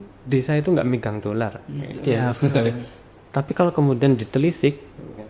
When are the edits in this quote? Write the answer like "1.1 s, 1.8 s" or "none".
none

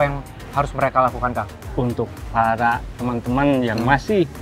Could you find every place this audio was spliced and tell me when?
1.6 s

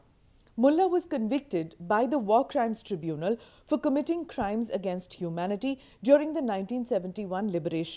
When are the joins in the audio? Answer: 1.2 s

